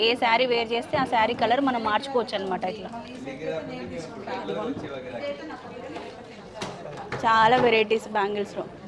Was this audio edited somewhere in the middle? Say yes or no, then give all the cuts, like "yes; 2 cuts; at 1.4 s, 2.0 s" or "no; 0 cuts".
no; 0 cuts